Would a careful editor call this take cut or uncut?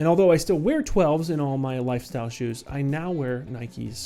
uncut